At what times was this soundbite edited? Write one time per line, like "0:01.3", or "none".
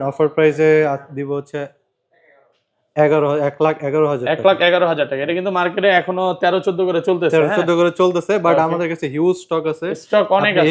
none